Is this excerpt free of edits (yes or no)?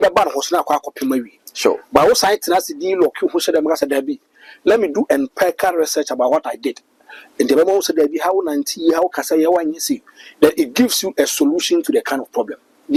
yes